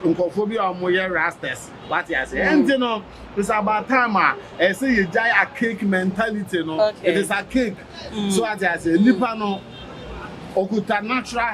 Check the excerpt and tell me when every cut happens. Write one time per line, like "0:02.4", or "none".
none